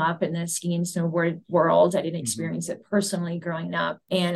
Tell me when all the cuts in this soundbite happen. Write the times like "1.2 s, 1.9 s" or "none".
none